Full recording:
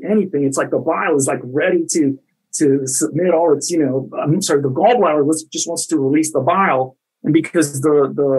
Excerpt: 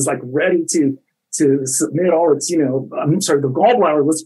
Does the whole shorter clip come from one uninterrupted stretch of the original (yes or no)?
yes